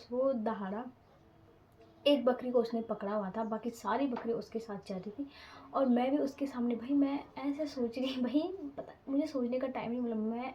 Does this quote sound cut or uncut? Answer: uncut